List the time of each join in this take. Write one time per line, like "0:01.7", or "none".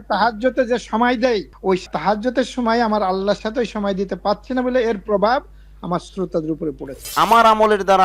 0:01.9
0:07.1